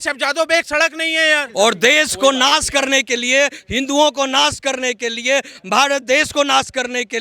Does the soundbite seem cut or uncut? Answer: cut